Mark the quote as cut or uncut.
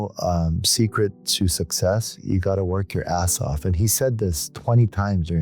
uncut